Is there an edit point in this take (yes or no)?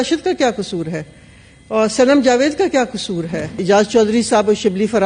yes